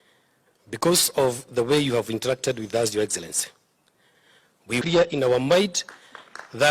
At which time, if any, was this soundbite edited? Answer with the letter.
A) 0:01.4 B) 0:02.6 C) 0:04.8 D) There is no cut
C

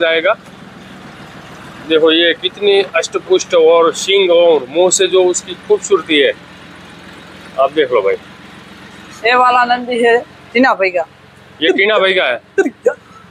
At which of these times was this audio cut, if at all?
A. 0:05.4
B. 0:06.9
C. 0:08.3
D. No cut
D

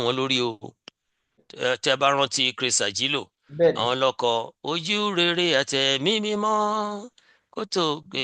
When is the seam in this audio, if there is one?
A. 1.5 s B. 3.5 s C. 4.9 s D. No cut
A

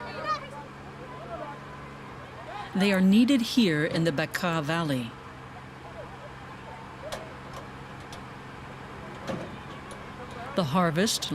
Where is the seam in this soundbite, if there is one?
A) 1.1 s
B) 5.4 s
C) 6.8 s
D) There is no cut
D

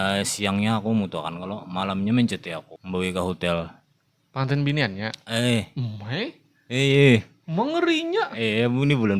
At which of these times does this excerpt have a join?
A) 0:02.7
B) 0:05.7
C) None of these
A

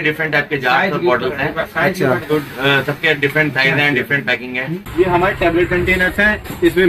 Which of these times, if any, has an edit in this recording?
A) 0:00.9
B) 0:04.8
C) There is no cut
B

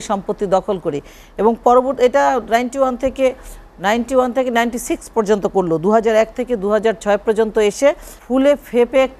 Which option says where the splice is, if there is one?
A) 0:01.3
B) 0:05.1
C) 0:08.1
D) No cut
C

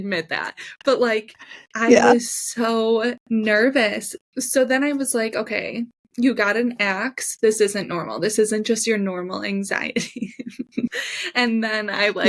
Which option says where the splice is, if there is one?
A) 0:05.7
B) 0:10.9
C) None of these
B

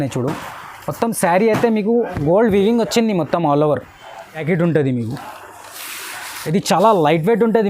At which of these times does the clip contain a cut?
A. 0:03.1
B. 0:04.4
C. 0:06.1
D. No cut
B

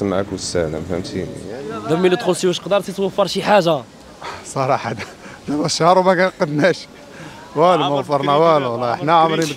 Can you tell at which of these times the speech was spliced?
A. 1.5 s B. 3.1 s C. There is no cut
A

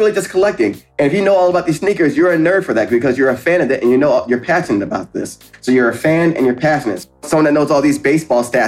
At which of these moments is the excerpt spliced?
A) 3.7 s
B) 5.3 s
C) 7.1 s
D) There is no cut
C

